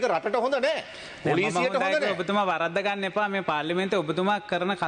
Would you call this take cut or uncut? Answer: uncut